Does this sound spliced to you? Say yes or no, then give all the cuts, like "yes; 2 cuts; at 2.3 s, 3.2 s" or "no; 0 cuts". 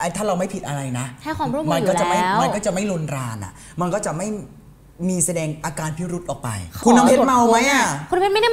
yes; 1 cut; at 6.8 s